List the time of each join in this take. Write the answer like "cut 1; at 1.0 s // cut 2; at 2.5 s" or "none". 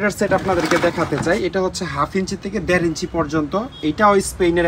none